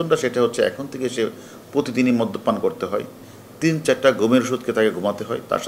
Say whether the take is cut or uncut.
uncut